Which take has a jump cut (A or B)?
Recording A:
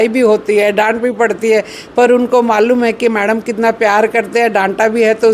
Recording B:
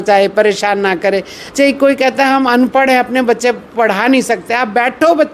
B